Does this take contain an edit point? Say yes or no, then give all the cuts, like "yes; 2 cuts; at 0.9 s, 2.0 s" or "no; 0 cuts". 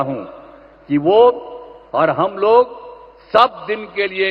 no; 0 cuts